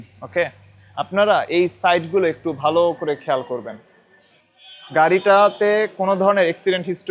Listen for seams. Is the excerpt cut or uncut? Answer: uncut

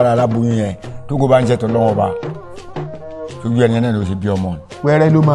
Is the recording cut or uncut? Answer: uncut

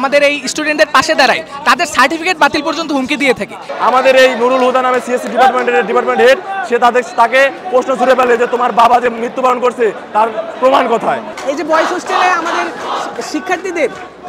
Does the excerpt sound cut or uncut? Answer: cut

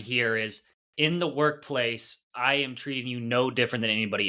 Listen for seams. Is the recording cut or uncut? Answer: uncut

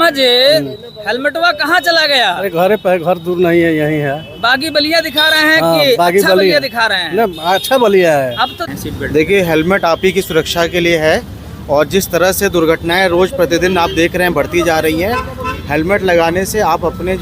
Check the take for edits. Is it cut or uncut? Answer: cut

